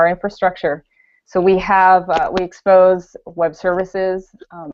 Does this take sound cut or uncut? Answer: cut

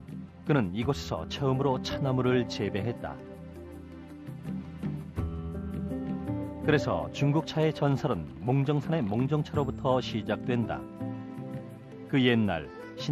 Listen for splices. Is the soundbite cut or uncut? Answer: uncut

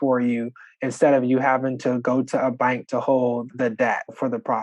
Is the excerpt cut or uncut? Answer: cut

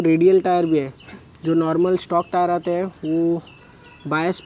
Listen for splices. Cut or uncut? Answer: uncut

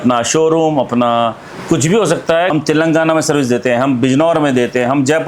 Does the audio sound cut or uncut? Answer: cut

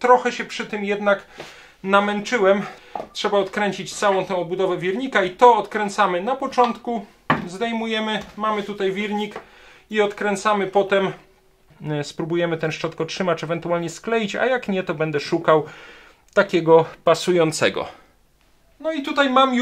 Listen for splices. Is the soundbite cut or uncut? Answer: cut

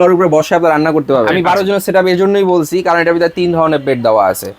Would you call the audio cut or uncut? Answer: cut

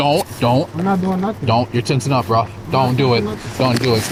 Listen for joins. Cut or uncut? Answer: uncut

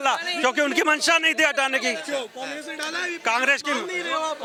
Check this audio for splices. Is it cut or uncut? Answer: uncut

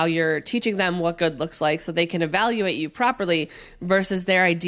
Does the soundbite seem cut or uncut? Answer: uncut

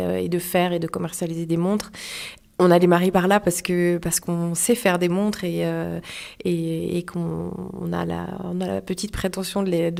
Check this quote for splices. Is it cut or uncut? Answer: uncut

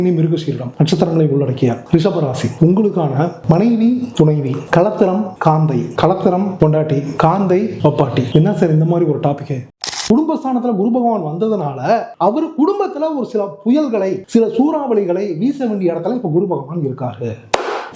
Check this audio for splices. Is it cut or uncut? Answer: cut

